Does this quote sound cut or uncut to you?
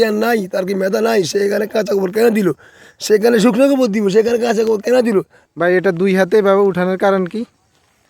cut